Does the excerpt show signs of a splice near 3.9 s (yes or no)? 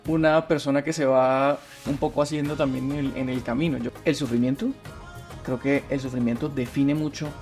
yes